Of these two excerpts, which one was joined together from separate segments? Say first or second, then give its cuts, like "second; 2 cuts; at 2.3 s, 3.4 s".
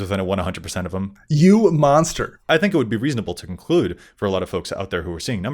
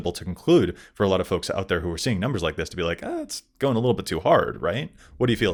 first; 2 cuts; at 1.2 s, 2.1 s